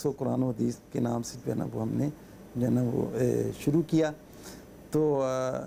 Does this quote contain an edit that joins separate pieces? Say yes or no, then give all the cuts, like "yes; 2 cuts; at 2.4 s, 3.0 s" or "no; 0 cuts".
no; 0 cuts